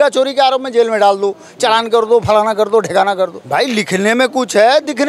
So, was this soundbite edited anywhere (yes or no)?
yes